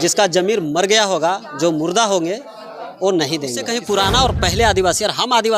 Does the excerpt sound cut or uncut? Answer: cut